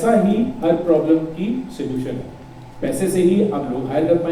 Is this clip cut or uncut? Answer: uncut